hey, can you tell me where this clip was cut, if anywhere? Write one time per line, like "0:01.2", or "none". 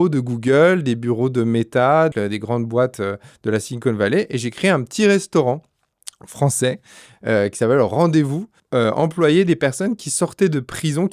0:02.1
0:08.5